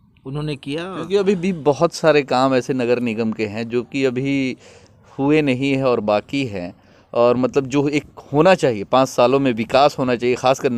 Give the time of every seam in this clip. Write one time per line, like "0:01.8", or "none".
none